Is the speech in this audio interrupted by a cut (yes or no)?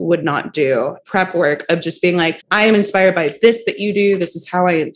yes